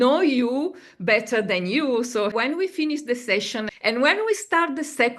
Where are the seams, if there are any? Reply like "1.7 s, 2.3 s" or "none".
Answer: 2.3 s, 3.7 s

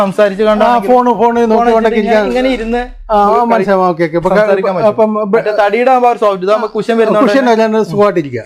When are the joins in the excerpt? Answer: none

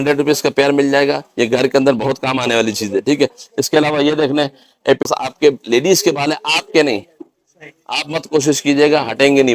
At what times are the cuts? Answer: 5.0 s

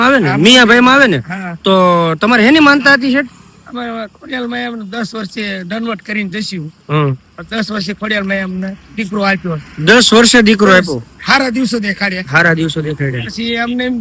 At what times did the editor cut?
none

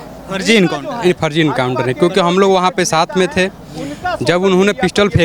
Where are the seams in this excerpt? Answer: none

